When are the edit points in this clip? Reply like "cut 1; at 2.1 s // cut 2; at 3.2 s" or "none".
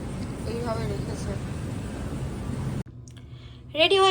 cut 1; at 2.8 s